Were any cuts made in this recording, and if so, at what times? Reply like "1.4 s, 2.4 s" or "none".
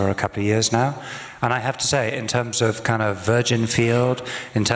none